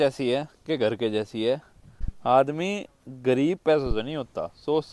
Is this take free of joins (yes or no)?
no